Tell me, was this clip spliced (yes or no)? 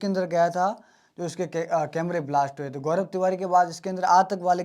no